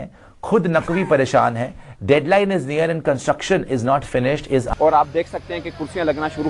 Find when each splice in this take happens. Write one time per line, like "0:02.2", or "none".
0:04.7